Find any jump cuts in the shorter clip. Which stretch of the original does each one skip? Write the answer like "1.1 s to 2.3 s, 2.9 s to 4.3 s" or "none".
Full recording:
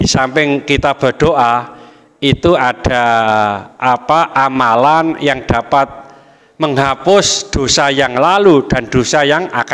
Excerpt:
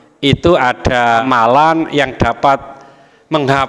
3.2 s to 4.5 s